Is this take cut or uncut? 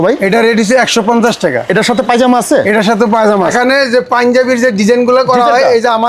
cut